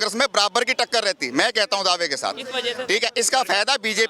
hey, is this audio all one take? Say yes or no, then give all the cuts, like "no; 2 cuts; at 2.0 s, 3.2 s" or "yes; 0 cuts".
yes; 0 cuts